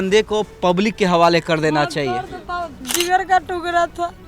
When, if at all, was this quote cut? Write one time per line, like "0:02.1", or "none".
0:02.8